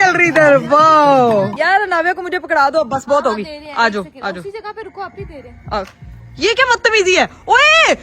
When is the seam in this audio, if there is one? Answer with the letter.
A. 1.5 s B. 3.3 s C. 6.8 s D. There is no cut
A